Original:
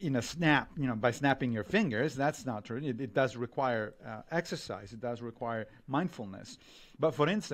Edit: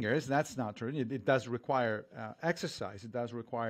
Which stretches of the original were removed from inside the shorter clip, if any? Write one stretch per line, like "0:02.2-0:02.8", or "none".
none